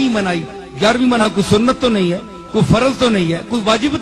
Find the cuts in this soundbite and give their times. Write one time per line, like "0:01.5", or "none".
0:01.2